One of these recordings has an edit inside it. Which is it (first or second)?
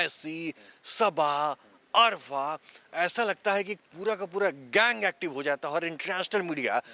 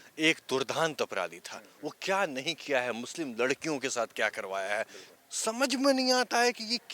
second